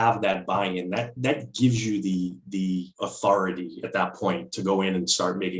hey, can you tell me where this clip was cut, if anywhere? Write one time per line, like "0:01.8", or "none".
none